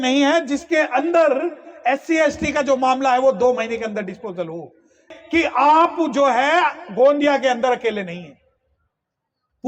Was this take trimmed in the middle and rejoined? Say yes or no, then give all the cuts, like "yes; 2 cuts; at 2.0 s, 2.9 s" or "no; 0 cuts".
yes; 1 cut; at 5.0 s